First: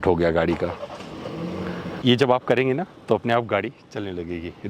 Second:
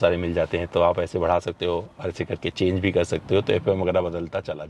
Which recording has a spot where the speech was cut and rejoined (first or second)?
first